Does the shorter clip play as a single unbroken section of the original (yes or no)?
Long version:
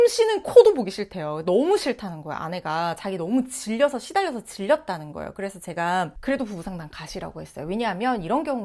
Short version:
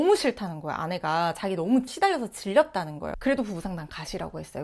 no